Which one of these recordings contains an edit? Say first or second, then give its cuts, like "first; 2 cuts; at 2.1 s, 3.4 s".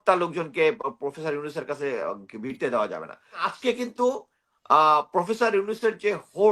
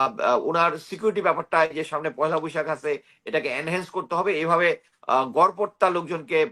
first; 1 cut; at 3.5 s